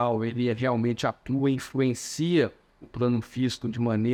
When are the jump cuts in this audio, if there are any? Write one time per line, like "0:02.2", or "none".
none